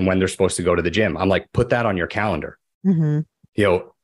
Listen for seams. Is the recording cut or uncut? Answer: uncut